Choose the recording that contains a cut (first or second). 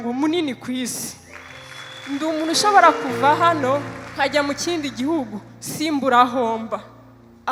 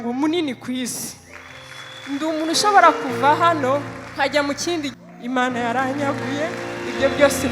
second